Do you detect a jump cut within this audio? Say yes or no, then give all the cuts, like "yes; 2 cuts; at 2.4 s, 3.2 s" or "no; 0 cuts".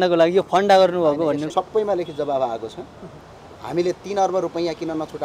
yes; 1 cut; at 1.5 s